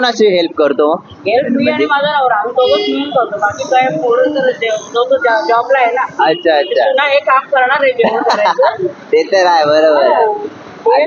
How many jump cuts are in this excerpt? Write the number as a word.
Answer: zero